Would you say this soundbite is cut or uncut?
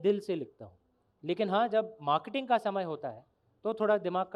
uncut